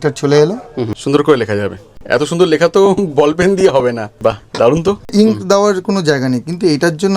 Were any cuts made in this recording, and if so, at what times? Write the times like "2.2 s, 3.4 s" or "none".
1.0 s, 2.0 s, 4.1 s, 5.1 s